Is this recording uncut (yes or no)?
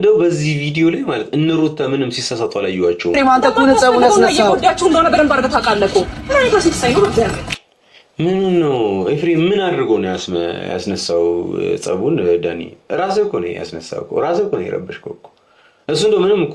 no